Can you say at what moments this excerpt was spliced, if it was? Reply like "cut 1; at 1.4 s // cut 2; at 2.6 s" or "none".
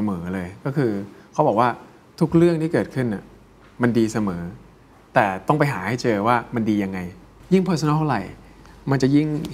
cut 1; at 7.3 s